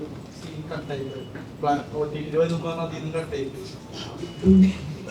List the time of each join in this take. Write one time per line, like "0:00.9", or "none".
0:03.8